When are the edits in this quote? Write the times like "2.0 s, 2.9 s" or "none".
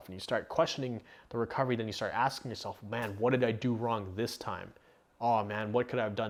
none